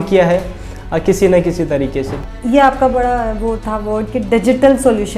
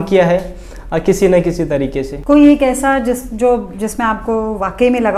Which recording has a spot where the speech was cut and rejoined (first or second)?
first